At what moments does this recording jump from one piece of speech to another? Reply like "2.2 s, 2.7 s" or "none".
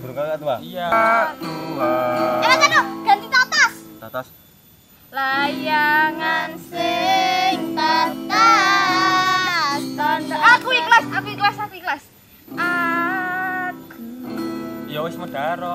0.9 s